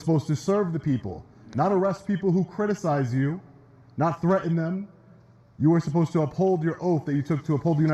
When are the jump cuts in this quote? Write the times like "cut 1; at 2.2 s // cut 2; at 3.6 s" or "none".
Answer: none